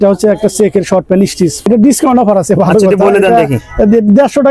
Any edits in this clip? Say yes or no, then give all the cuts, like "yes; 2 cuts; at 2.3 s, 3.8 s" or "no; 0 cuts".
yes; 1 cut; at 1.7 s